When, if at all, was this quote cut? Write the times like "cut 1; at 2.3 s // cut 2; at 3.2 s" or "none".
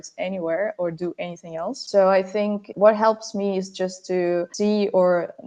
cut 1; at 1.8 s // cut 2; at 2.7 s // cut 3; at 4.5 s